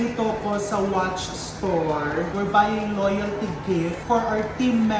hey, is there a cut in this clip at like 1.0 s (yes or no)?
no